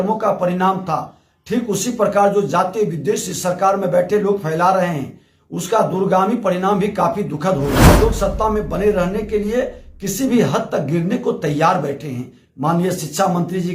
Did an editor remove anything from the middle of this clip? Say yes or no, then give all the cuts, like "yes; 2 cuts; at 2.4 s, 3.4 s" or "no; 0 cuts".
yes; 1 cut; at 8.0 s